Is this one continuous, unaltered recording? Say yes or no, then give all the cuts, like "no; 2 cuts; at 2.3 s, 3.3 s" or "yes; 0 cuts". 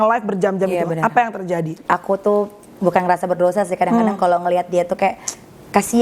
no; 1 cut; at 1.8 s